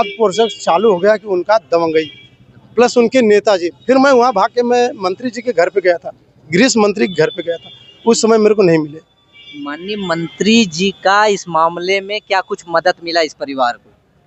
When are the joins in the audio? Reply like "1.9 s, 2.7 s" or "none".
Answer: none